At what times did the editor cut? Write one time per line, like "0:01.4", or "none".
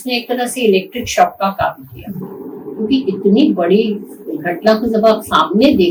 none